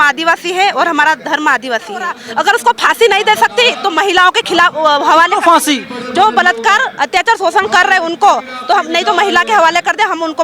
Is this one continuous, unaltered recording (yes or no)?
no